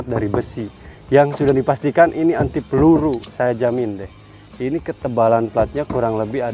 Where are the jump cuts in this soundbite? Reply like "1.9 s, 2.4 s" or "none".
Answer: none